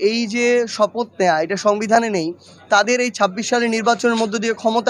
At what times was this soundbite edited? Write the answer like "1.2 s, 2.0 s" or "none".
none